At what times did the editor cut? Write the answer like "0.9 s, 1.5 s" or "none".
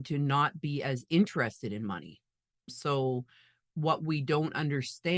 2.8 s